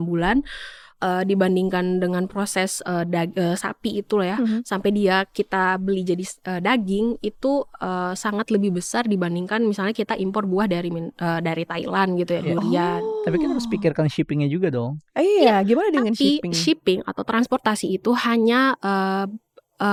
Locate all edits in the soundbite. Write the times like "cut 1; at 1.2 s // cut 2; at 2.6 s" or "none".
none